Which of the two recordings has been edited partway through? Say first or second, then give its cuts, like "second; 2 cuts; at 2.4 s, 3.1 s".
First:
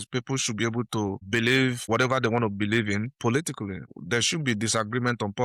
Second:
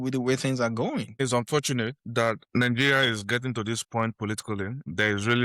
second; 1 cut; at 1.2 s